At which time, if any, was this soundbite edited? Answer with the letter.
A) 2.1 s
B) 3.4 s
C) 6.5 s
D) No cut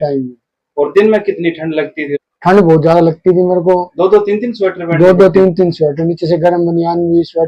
A